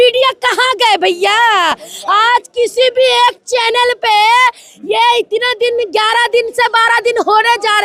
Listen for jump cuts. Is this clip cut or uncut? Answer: uncut